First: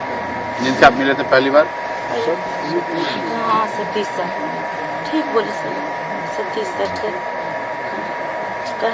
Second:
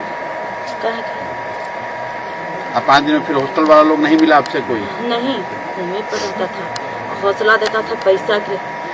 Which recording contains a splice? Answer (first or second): second